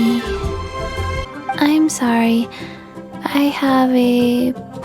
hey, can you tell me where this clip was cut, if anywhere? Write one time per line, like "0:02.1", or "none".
0:01.2